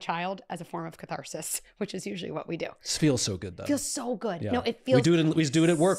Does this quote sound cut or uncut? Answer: uncut